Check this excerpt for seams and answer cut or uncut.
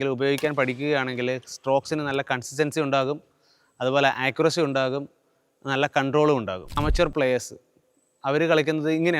cut